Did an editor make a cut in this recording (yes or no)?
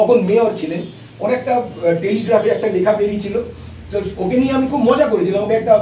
no